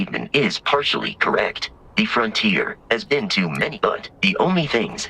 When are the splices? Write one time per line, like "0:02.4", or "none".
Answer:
0:03.7